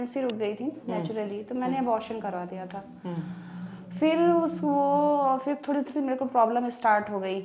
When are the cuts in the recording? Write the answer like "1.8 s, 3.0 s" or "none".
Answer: none